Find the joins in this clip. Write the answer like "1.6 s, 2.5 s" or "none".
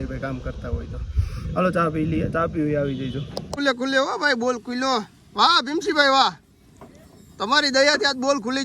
3.1 s